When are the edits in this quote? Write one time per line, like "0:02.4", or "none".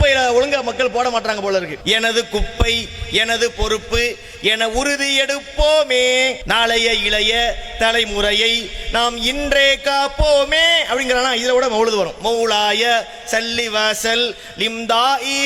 0:01.7
0:06.4